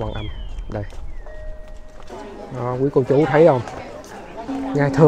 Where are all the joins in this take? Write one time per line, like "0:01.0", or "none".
0:02.1